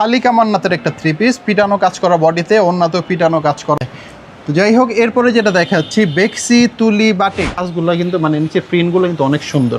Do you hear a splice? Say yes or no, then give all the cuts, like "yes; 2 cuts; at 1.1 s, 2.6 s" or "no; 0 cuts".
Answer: yes; 2 cuts; at 3.8 s, 7.6 s